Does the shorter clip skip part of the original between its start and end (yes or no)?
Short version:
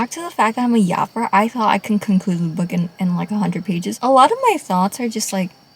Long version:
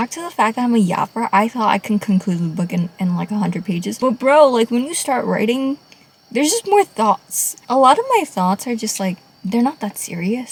yes